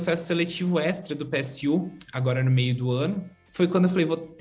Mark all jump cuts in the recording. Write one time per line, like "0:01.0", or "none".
0:03.4